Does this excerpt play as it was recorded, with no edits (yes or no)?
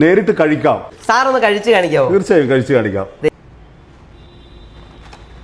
no